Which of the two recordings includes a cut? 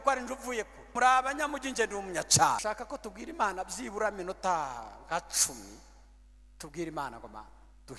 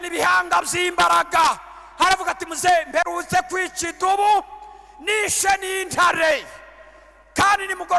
first; 2 cuts; at 0.9 s, 2.6 s

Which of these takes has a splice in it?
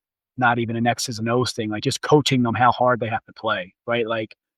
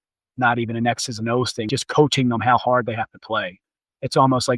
second; 2 cuts; at 1.7 s, 3.6 s

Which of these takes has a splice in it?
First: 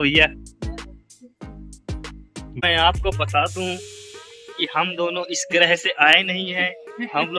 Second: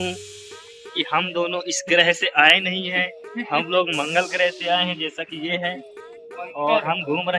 first; 1 cut; at 2.6 s

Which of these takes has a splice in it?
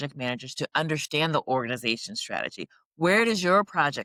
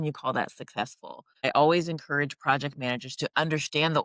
second; 1 cut; at 1.4 s

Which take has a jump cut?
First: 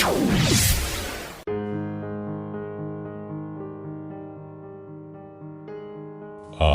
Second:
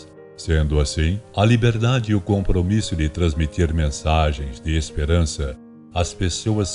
first; 1 cut; at 1.4 s

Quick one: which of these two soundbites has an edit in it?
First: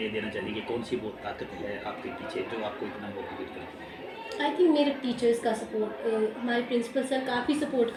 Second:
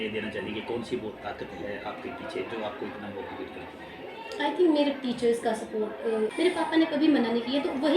second; 1 cut; at 6.3 s

